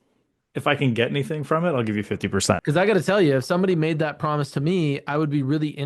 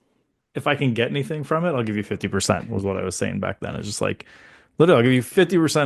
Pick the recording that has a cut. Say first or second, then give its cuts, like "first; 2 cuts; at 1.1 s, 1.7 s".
first; 1 cut; at 2.6 s